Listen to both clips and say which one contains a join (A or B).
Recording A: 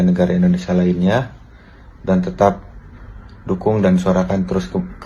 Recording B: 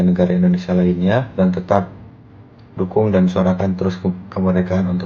B